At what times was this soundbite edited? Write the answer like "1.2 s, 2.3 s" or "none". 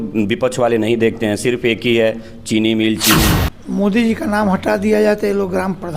3.3 s